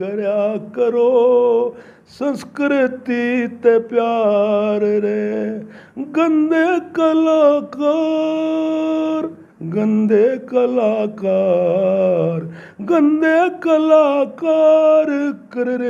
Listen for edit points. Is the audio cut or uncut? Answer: uncut